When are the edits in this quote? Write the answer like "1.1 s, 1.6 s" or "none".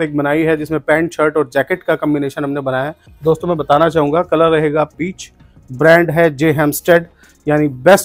3.0 s